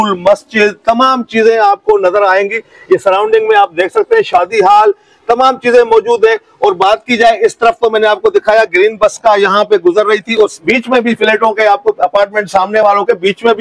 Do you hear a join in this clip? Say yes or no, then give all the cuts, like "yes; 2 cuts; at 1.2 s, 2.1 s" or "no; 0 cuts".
no; 0 cuts